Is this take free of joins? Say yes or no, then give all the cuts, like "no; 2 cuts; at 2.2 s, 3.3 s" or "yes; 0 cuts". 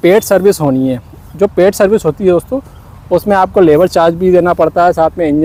yes; 0 cuts